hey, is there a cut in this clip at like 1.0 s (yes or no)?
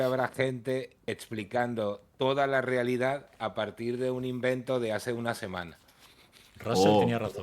yes